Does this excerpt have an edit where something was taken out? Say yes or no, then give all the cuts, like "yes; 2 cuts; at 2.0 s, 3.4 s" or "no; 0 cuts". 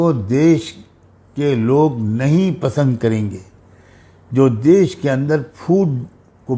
no; 0 cuts